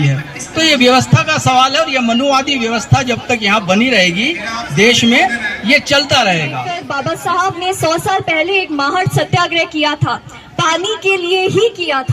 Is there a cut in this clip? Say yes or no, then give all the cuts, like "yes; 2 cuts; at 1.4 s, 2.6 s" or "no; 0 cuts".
yes; 1 cut; at 6.8 s